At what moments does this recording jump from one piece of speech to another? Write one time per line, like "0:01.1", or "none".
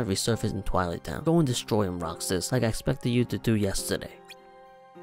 0:01.1